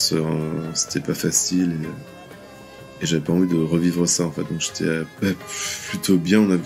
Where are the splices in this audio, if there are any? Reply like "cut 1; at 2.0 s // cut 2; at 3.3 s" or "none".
cut 1; at 5.1 s

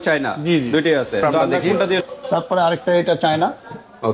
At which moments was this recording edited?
cut 1; at 2.0 s

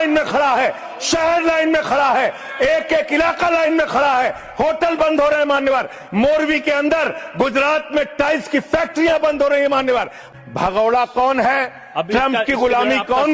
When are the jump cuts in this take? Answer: cut 1; at 10.2 s

